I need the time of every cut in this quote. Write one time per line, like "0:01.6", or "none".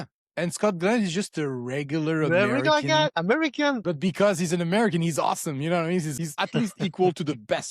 0:03.8
0:06.3